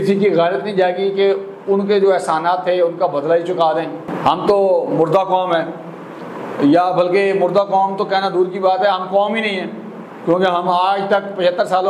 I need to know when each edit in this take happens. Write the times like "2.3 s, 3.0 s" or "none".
none

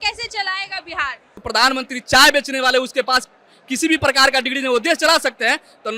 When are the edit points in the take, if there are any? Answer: 1.4 s

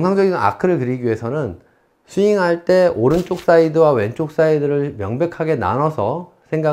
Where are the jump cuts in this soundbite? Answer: none

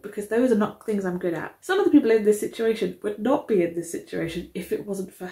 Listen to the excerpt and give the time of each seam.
1.5 s

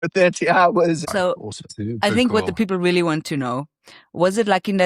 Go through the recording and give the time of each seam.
1.0 s

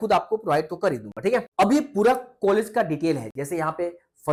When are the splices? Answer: none

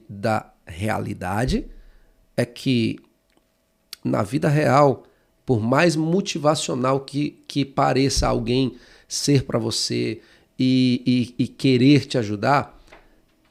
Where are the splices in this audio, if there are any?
none

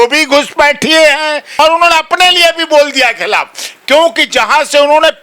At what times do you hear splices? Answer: 1.6 s

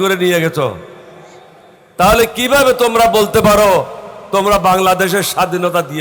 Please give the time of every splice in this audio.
none

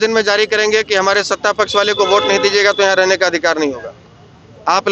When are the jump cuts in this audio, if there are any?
none

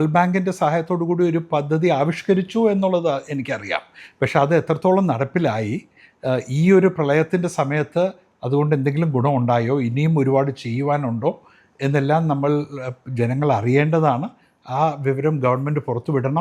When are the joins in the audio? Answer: none

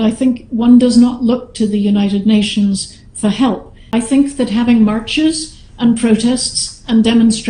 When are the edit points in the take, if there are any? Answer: 3.8 s

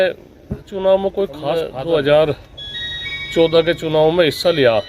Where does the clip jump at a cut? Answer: 1.7 s

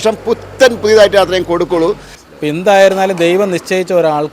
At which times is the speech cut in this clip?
2.1 s

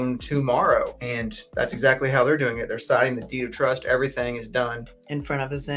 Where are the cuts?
1.0 s

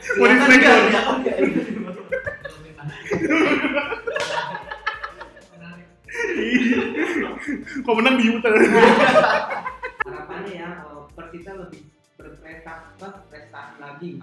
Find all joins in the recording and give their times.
9.8 s

